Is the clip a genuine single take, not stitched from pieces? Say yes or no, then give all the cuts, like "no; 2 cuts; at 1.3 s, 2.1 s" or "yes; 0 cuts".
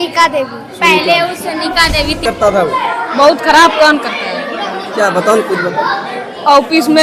no; 1 cut; at 2.2 s